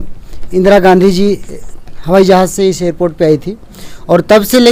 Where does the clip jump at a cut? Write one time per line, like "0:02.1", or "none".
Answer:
none